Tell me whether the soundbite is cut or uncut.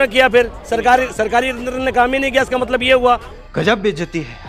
uncut